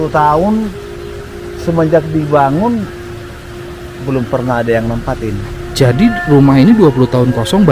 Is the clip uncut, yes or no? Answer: yes